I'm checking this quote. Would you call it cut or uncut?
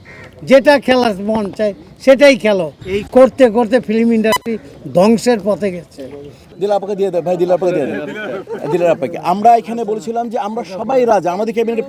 cut